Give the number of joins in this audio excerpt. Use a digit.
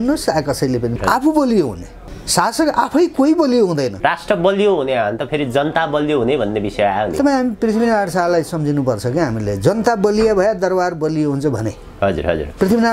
2